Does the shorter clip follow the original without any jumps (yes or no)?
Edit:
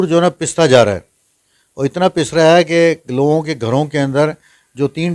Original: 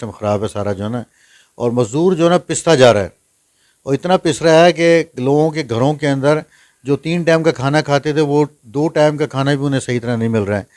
yes